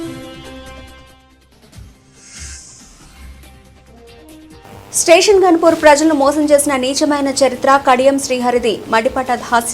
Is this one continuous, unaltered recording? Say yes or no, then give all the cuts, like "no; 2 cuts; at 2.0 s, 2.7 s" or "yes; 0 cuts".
no; 1 cut; at 4.9 s